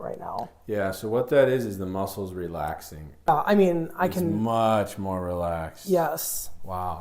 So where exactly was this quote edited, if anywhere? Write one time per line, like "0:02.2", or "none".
0:03.3